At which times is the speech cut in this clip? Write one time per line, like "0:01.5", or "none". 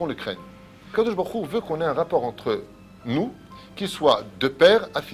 0:00.9